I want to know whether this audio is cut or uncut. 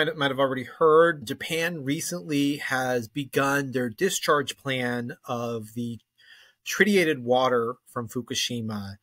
cut